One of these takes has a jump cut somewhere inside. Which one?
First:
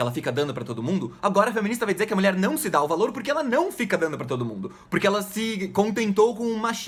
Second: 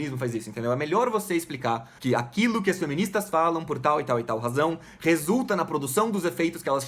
second; 1 cut; at 1.9 s

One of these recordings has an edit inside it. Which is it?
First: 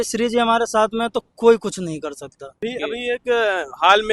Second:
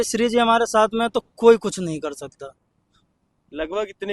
first; 1 cut; at 2.4 s

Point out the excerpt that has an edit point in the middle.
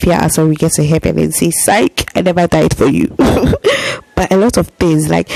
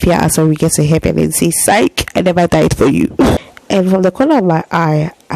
second; 1 cut; at 3.4 s

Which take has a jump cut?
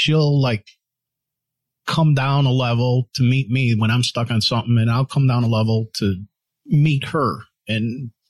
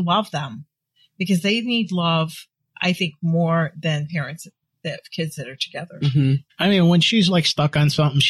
second; 1 cut; at 6.5 s

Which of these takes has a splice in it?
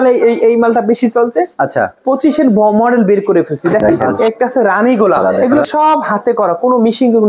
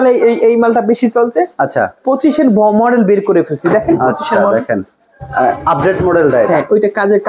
first; 2 cuts; at 4.0 s, 5.2 s

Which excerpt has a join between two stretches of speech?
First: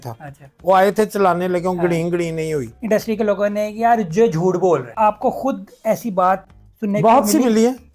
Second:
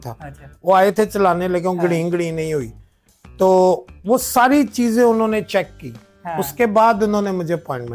first; 2 cuts; at 2.8 s, 4.9 s

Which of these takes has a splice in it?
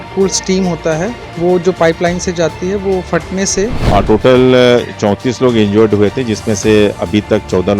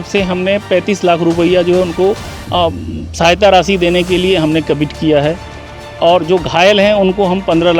first; 2 cuts; at 1.2 s, 3.8 s

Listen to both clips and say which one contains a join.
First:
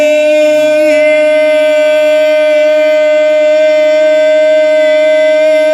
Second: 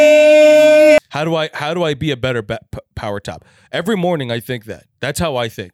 second; 1 cut; at 1.0 s

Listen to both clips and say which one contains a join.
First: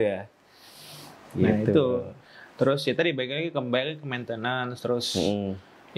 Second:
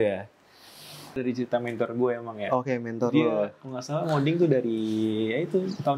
second; 1 cut; at 1.1 s

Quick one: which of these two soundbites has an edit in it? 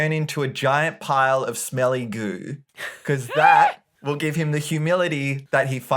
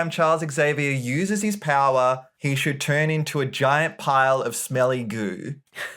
first; 1 cut; at 3.9 s

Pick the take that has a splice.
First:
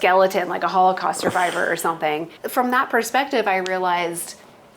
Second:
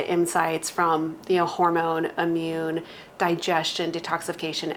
first; 1 cut; at 2.3 s

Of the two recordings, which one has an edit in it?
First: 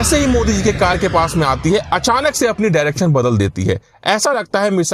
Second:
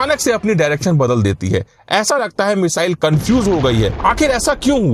second; 1 cut; at 3.9 s

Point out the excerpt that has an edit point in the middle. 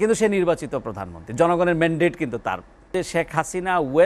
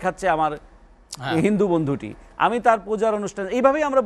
first; 1 cut; at 2.9 s

